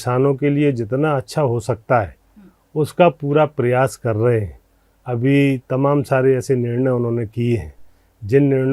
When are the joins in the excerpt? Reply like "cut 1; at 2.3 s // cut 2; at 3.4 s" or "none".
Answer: none